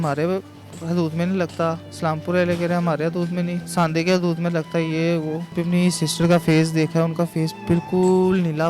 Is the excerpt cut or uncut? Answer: cut